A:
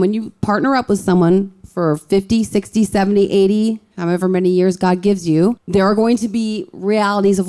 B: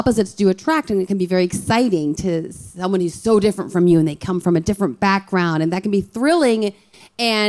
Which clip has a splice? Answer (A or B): A